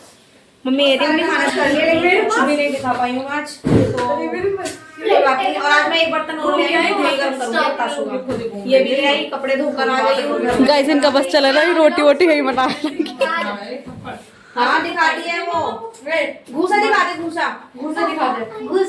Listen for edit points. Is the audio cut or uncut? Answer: cut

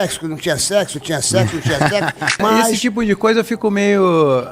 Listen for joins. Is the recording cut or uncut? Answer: cut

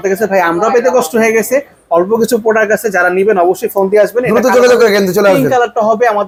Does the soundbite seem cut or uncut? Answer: uncut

